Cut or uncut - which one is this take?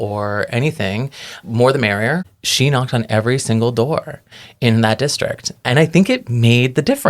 cut